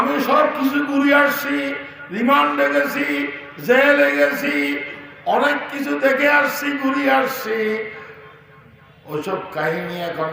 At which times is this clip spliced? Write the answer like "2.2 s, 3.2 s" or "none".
none